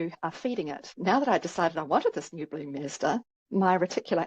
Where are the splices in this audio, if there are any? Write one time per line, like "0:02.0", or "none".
0:00.9